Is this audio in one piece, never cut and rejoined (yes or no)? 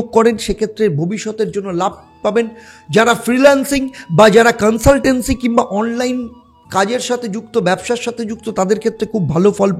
yes